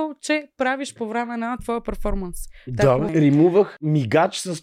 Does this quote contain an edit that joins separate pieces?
yes; 2 cuts; at 3.1 s, 3.8 s

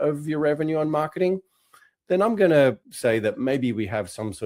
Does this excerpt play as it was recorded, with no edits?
no; 1 cut; at 2.8 s

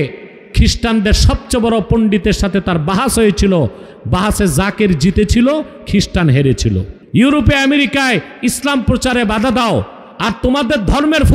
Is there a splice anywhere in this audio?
yes; 1 cut; at 6.9 s

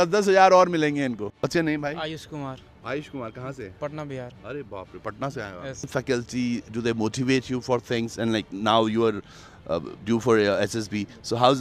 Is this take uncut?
no; 2 cuts; at 1.3 s, 5.9 s

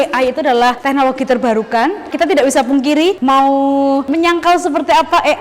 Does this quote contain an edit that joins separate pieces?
yes; 3 cuts; at 0.8 s, 2.1 s, 4.1 s

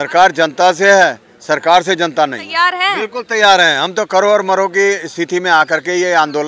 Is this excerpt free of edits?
no; 1 cut; at 2.7 s

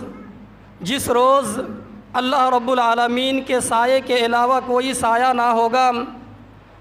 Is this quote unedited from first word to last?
yes; 0 cuts

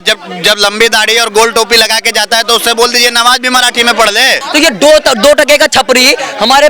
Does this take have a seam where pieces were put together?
yes; 1 cut; at 4.4 s

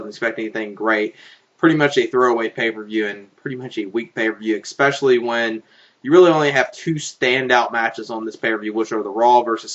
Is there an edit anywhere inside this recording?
yes; 1 cut; at 3.4 s

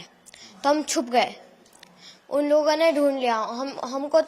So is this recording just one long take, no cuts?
yes; 0 cuts

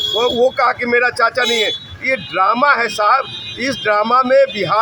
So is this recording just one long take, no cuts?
yes; 0 cuts

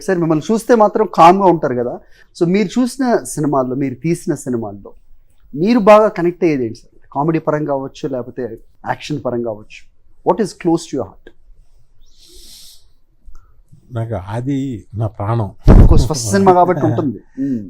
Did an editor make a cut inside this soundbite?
yes; 1 cut; at 8.7 s

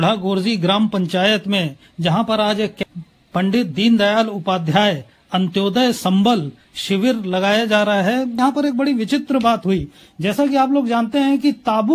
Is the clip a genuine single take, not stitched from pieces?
no; 2 cuts; at 2.8 s, 8.4 s

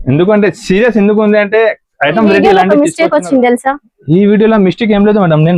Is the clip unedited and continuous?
no; 1 cut; at 2.4 s

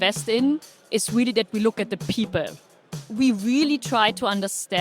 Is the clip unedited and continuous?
no; 1 cut; at 3.0 s

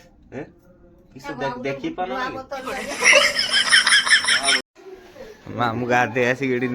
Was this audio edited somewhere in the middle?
yes; 1 cut; at 4.7 s

